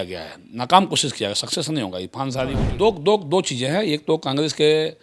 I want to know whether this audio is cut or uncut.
cut